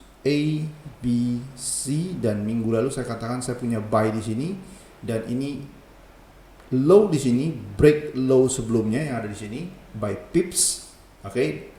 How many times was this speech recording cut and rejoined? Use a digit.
0